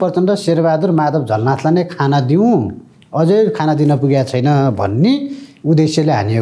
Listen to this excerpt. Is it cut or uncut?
uncut